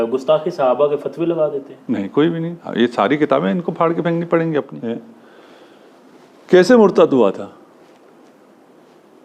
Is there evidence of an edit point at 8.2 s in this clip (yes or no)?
no